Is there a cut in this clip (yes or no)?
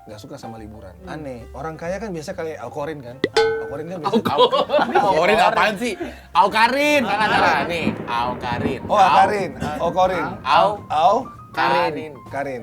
yes